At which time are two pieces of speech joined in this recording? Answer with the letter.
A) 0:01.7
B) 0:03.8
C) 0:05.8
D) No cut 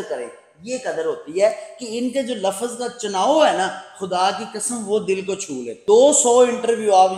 C